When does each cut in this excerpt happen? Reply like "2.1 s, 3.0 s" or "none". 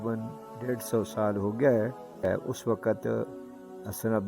2.2 s